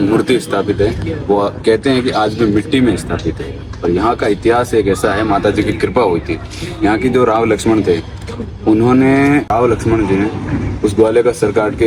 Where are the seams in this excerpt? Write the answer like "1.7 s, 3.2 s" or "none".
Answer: 9.5 s